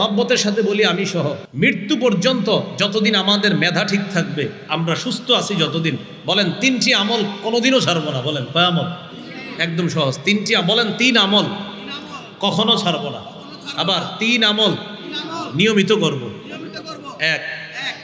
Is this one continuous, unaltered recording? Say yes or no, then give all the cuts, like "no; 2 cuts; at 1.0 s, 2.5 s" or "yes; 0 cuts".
no; 1 cut; at 1.4 s